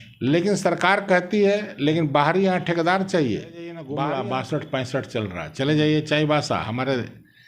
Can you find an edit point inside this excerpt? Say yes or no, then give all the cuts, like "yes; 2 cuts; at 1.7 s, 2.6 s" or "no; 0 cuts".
yes; 1 cut; at 3.8 s